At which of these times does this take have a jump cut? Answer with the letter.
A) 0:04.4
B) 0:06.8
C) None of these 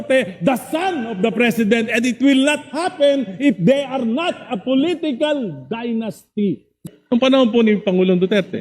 B